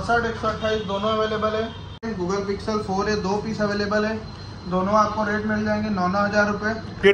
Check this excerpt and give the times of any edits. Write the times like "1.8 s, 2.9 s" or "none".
2.0 s